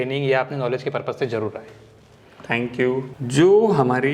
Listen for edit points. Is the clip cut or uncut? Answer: cut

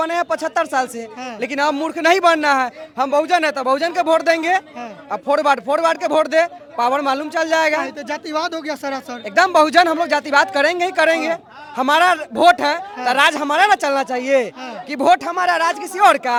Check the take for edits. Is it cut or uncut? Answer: uncut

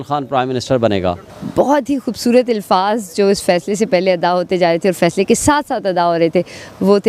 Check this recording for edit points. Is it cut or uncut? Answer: cut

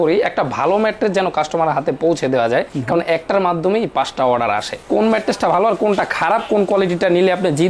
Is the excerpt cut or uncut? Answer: cut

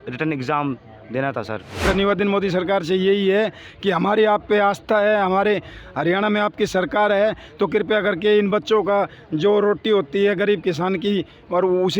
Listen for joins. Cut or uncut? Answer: cut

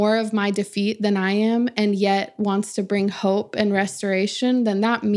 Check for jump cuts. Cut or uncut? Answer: uncut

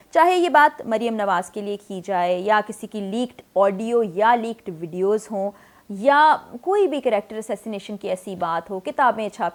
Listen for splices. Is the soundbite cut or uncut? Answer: uncut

